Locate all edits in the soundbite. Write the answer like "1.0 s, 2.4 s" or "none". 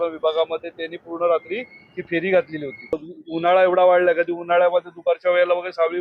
3.1 s